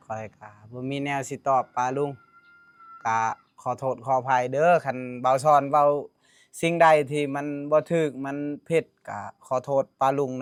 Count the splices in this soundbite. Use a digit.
0